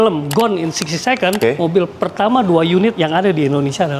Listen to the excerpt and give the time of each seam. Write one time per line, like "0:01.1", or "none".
0:01.4